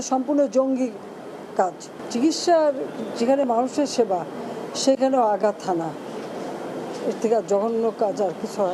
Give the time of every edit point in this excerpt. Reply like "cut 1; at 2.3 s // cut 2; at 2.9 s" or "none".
none